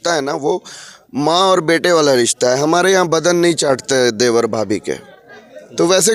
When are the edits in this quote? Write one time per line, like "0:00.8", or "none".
none